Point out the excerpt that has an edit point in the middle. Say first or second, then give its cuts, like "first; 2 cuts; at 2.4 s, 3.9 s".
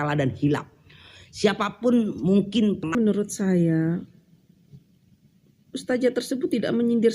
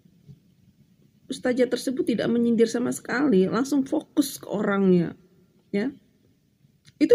first; 1 cut; at 2.9 s